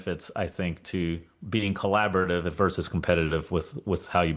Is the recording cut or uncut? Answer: uncut